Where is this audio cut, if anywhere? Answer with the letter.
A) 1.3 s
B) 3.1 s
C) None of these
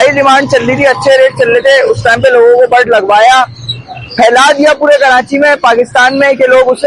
C